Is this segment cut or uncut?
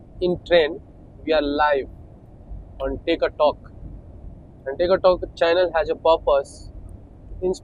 uncut